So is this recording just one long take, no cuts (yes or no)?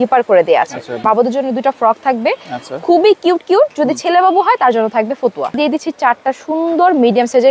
no